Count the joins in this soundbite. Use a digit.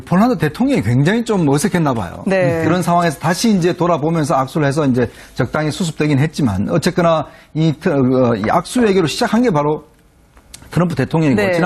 1